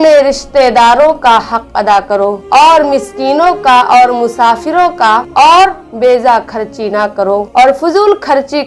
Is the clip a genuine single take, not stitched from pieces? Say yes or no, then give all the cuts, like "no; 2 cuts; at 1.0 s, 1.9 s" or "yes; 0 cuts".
yes; 0 cuts